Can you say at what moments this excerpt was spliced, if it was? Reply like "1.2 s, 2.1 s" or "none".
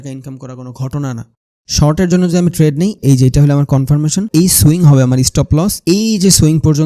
1.4 s, 3.0 s, 4.3 s, 5.8 s